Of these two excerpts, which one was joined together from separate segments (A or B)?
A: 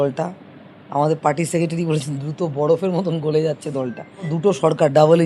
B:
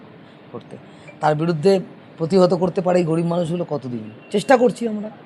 A